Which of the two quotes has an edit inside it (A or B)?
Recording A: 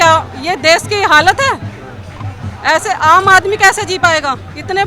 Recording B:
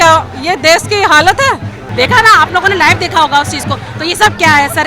B